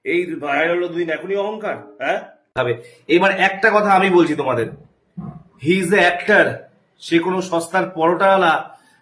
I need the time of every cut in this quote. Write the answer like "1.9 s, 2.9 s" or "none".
none